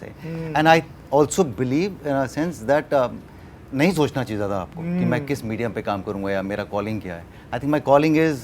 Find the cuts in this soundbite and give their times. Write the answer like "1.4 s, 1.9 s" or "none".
none